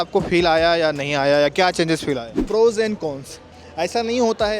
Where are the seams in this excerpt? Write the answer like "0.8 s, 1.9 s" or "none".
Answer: 2.3 s